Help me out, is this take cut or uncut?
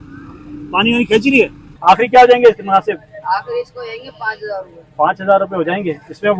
cut